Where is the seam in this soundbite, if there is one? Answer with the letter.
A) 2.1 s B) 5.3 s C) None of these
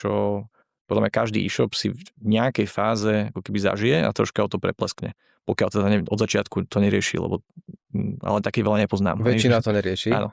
C